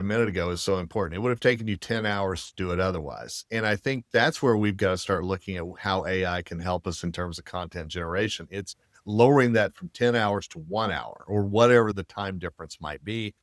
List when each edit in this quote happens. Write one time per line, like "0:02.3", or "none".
none

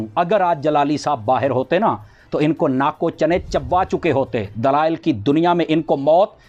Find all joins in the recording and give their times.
none

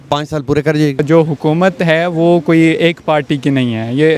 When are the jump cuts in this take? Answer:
0:01.0

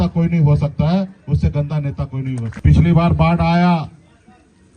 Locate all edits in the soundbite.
0:02.4

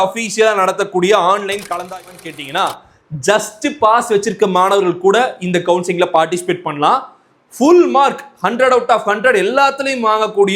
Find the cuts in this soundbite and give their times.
0:02.2

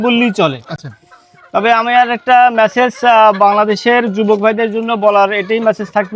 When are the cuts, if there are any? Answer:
none

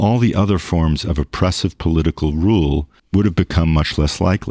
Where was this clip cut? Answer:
0:03.0

